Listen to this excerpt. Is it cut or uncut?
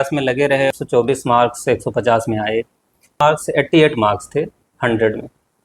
cut